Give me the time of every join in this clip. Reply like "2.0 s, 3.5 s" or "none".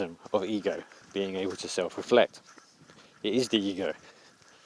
0.9 s